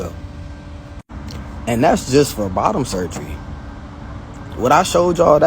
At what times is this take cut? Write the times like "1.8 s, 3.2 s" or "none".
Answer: 1.4 s